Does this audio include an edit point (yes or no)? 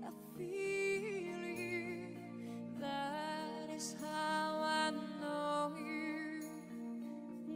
no